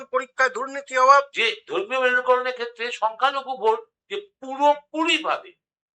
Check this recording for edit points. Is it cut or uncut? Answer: cut